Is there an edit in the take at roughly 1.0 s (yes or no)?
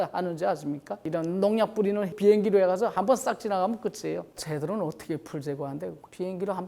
yes